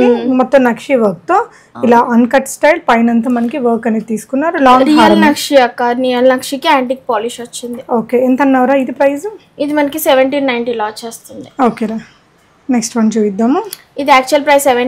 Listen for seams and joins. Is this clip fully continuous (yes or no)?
yes